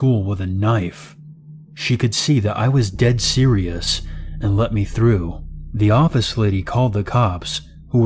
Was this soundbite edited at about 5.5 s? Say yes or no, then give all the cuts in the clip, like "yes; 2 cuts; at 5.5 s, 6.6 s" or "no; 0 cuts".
yes; 1 cut; at 5.5 s